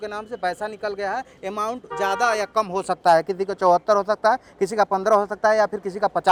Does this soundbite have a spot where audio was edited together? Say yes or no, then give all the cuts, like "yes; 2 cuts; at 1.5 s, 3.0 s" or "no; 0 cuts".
no; 0 cuts